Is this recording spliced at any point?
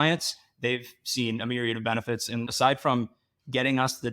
yes; 1 cut; at 2.5 s

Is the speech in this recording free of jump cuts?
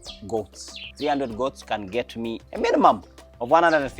no; 2 cuts; at 0.9 s, 2.4 s

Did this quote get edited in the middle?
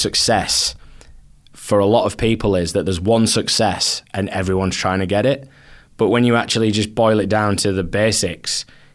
no; 0 cuts

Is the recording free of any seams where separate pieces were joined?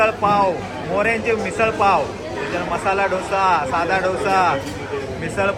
yes; 0 cuts

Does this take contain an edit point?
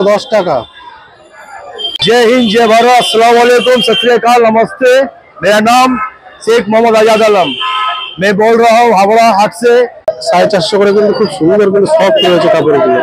yes; 2 cuts; at 1.9 s, 10.1 s

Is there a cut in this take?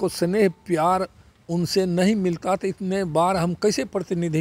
no; 0 cuts

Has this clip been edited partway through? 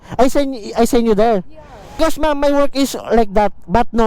yes; 1 cut; at 2.0 s

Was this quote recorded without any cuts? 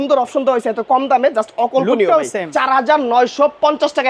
no; 1 cut; at 2.5 s

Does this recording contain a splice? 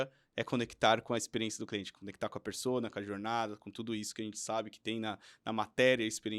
no; 0 cuts

